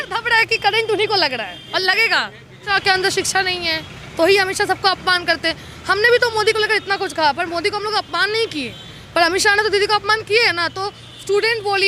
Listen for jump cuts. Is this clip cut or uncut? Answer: cut